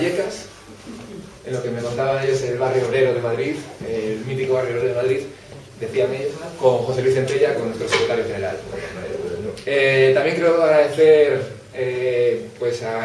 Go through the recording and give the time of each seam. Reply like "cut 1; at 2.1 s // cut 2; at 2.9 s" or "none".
cut 1; at 4.8 s